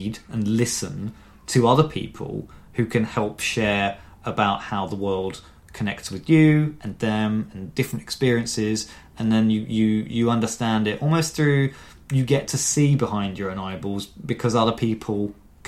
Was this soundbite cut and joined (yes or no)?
no